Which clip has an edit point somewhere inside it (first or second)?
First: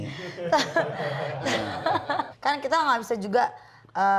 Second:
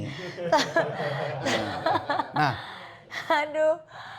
first